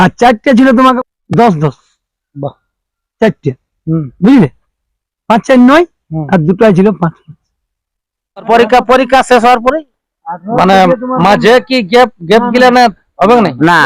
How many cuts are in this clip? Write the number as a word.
two